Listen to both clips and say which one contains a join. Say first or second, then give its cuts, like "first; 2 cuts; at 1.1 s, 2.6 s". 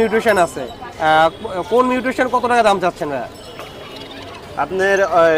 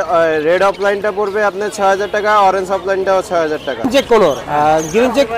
second; 1 cut; at 3.9 s